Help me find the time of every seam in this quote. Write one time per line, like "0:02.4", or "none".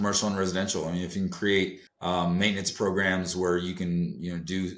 0:01.9